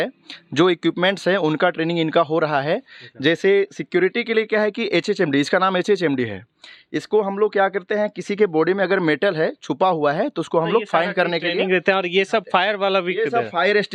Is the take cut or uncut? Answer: uncut